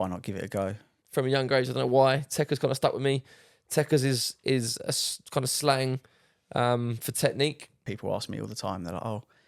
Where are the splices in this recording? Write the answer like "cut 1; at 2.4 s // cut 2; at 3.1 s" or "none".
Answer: cut 1; at 1.0 s // cut 2; at 7.8 s